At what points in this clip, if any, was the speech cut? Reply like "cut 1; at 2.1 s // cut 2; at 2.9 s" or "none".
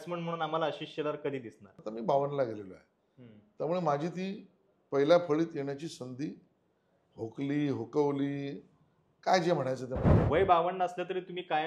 cut 1; at 1.8 s // cut 2; at 10.1 s